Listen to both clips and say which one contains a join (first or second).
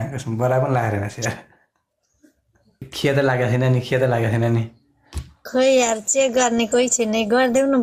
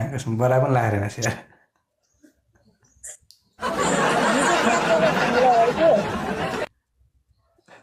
first